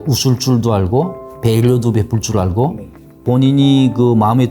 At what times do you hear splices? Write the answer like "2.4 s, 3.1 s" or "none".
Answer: 1.2 s, 3.2 s